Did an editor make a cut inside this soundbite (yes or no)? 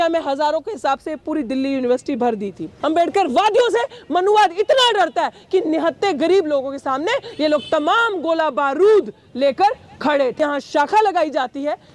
yes